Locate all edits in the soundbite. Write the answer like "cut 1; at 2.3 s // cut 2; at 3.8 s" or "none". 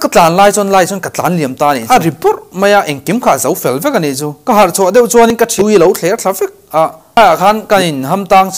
cut 1; at 1.8 s // cut 2; at 5.6 s // cut 3; at 7.2 s